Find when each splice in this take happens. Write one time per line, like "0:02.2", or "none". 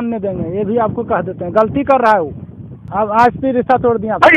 0:02.8

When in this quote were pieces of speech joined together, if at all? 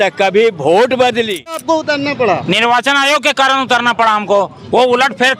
0:01.6

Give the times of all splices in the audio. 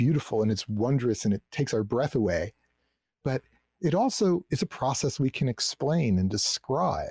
none

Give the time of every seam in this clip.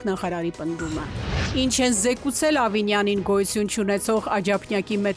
none

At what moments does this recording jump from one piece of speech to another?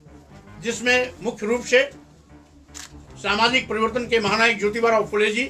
none

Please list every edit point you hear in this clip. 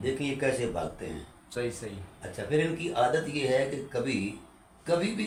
none

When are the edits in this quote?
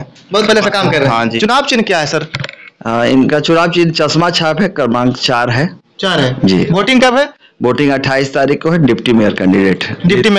0:01.4

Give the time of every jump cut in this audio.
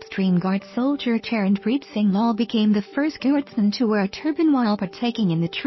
none

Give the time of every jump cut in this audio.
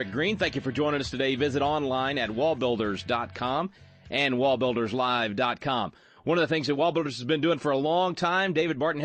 0:06.1

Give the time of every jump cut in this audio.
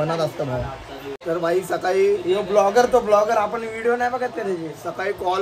0:01.1

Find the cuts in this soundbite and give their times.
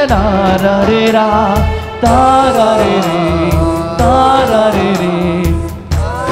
none

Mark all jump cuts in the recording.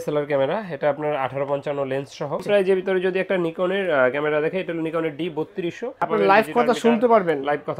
0:02.4
0:06.0

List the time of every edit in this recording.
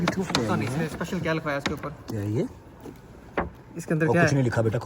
none

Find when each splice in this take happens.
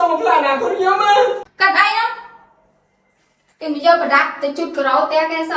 0:01.5

